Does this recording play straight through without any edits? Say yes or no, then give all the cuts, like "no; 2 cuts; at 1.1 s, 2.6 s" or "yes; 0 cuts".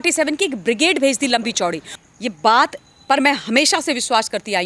no; 1 cut; at 1.9 s